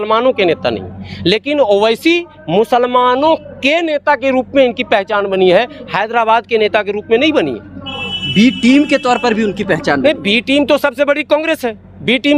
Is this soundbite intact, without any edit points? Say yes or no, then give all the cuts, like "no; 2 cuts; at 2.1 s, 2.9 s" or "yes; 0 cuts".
yes; 0 cuts